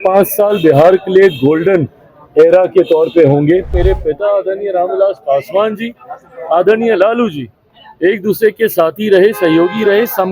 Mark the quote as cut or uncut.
cut